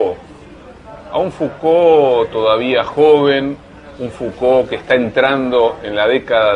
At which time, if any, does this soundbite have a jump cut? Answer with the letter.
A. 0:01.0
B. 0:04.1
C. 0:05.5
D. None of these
C